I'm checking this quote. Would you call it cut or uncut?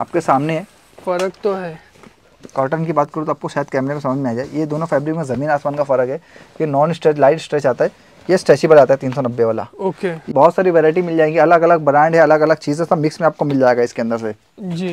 cut